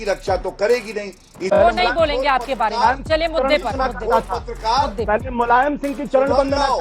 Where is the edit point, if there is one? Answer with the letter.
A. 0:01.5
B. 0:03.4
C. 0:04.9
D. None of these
A